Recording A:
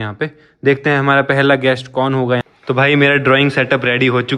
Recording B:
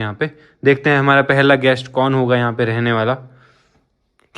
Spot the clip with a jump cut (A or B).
A